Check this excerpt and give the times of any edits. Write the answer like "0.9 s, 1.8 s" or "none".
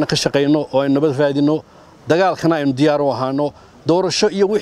none